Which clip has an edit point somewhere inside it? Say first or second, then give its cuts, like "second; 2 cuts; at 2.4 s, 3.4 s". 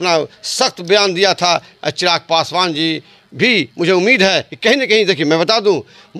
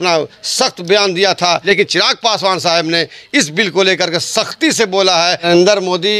second; 2 cuts; at 1.6 s, 5.4 s